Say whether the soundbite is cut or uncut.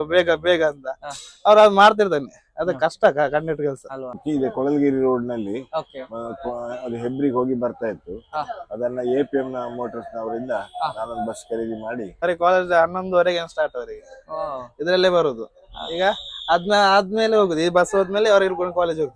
cut